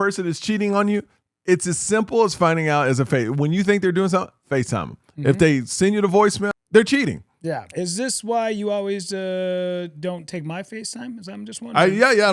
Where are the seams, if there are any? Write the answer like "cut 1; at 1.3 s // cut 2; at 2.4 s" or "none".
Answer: cut 1; at 6.5 s // cut 2; at 7.7 s